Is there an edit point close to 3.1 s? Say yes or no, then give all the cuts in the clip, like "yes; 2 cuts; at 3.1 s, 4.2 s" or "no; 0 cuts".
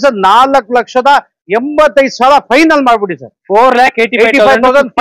no; 0 cuts